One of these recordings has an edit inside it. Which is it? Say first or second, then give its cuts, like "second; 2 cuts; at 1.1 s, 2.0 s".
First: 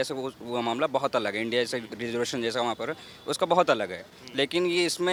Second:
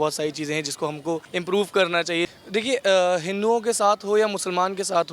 second; 2 cuts; at 1.3 s, 2.3 s